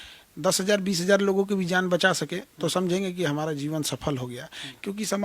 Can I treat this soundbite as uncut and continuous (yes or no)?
yes